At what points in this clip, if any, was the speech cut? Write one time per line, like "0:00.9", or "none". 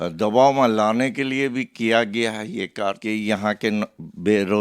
0:03.3